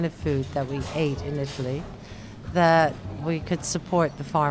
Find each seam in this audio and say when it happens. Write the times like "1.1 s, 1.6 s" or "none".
3.1 s